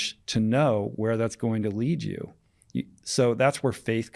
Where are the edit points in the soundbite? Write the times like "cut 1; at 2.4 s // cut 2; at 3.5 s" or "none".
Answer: none